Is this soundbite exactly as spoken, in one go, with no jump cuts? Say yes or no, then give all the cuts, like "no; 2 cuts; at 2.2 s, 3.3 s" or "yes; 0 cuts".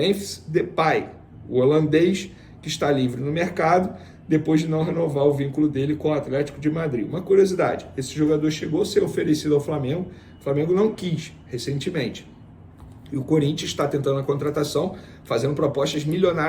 yes; 0 cuts